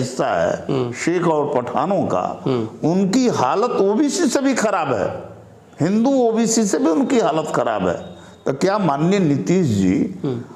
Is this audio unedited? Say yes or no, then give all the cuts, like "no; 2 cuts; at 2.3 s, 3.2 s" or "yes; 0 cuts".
yes; 0 cuts